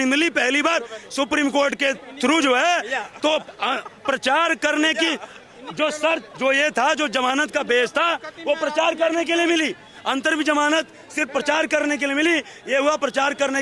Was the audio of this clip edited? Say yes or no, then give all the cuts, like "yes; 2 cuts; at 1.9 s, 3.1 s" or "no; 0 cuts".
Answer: no; 0 cuts